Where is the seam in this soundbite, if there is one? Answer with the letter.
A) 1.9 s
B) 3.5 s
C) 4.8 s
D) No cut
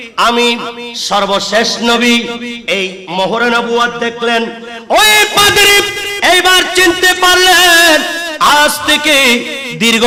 D